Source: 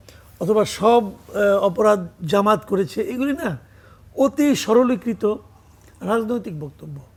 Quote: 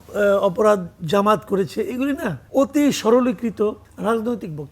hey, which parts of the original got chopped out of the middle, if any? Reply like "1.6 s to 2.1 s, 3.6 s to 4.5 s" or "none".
3.6 s to 4.0 s, 5.5 s to 5.9 s